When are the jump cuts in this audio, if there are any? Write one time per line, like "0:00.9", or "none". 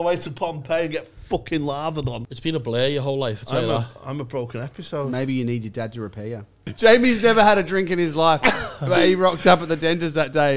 0:02.3
0:06.6